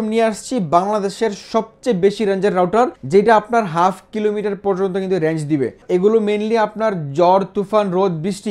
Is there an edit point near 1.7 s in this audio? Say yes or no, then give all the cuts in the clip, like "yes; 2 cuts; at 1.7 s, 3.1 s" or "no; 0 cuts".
no; 2 cuts; at 3.0 s, 5.8 s